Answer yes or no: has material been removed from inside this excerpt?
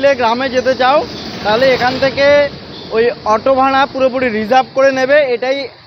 no